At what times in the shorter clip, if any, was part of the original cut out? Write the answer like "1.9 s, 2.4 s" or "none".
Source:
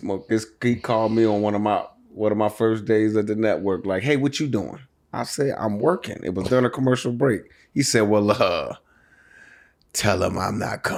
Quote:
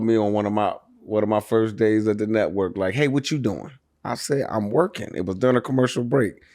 none